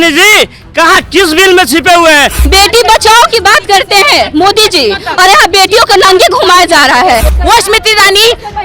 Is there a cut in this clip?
yes; 2 cuts; at 2.4 s, 7.3 s

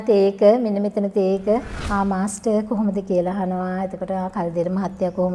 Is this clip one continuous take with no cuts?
no; 1 cut; at 1.8 s

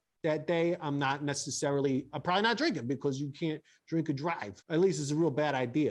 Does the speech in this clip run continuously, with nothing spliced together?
no; 1 cut; at 4.5 s

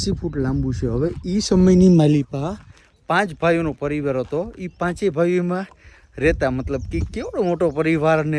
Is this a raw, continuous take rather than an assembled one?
yes; 0 cuts

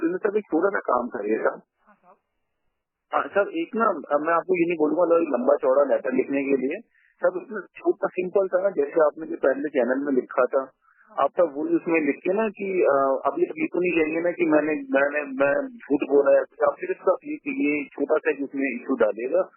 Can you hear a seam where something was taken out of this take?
no; 0 cuts

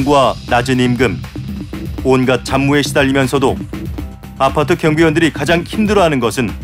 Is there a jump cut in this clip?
no; 0 cuts

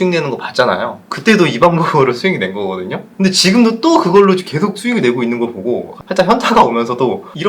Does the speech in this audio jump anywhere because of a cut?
no; 0 cuts

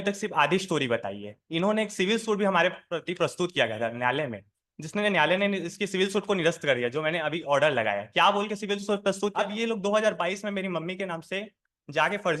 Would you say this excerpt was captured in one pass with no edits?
no; 1 cut; at 9.3 s

